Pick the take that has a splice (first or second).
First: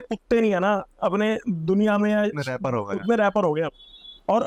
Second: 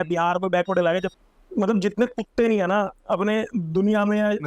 second